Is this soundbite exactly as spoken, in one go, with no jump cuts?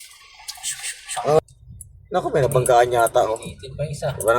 no; 1 cut; at 1.4 s

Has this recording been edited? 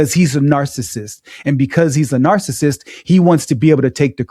no; 0 cuts

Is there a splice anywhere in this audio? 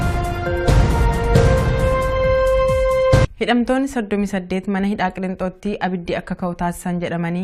no; 0 cuts

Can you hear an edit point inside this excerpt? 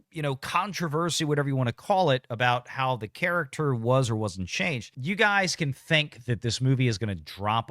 yes; 1 cut; at 4.9 s

